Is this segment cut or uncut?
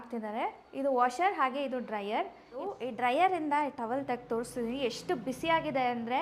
cut